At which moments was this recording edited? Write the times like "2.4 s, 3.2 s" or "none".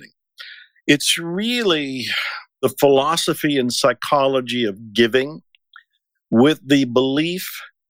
2.6 s